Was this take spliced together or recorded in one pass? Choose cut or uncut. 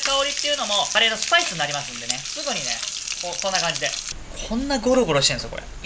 cut